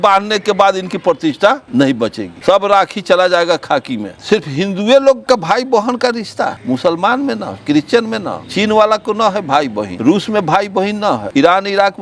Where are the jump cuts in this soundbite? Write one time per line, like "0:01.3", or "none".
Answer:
0:04.1
0:05.2
0:06.6
0:09.9
0:11.2